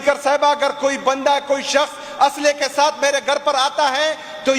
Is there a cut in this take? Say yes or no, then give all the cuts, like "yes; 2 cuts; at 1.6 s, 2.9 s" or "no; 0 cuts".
no; 0 cuts